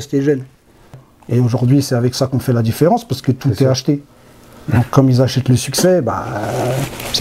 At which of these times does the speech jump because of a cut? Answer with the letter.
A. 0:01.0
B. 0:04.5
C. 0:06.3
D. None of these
A